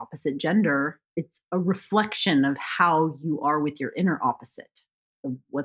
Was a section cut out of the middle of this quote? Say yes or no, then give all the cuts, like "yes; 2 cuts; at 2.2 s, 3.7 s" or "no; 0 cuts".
yes; 1 cut; at 1.0 s